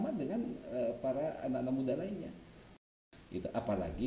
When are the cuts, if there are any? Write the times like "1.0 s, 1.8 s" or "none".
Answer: 2.7 s